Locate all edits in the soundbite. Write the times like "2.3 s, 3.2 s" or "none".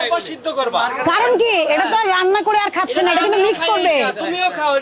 none